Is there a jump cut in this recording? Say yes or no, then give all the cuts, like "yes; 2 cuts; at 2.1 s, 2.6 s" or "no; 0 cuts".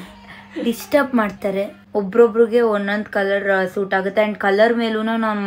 yes; 1 cut; at 1.8 s